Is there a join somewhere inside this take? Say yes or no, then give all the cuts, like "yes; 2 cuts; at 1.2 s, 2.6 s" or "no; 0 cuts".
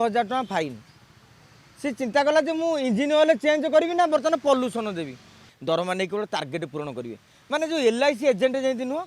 yes; 1 cut; at 5.5 s